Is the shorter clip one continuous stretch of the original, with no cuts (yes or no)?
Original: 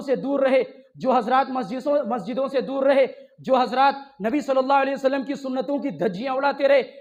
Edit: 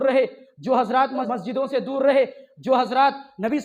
no